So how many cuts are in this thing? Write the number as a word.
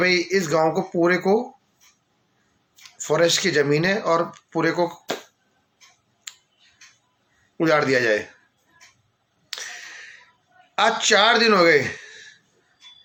zero